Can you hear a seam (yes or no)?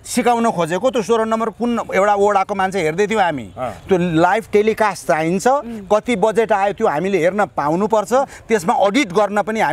no